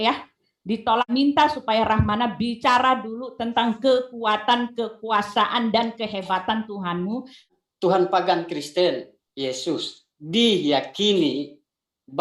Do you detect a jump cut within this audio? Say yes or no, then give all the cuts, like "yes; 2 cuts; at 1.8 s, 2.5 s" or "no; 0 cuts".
yes; 2 cuts; at 1.1 s, 7.4 s